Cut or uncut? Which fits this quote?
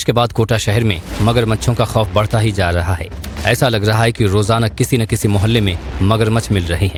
uncut